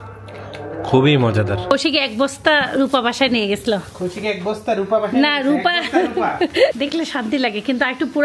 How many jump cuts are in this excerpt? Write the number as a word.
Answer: two